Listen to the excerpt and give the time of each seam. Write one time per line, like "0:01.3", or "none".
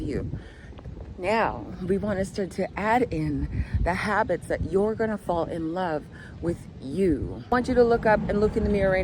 0:07.5